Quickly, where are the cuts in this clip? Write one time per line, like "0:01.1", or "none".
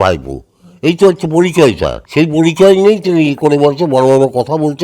0:01.9